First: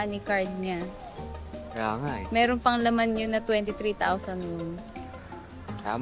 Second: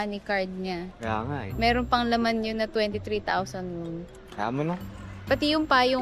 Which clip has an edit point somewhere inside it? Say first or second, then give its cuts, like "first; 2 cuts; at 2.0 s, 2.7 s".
second; 2 cuts; at 0.9 s, 4.2 s